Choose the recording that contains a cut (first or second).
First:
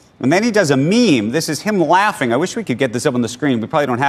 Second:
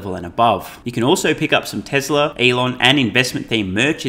second